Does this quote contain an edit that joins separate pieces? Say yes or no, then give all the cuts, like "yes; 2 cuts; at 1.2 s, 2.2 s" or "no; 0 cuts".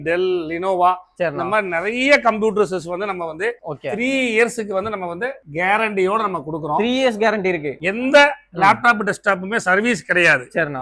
no; 0 cuts